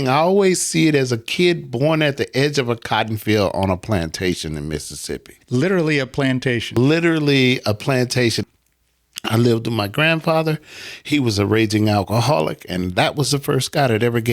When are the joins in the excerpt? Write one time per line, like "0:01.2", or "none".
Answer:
0:08.4